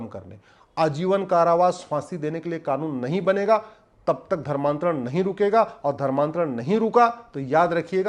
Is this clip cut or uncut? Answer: uncut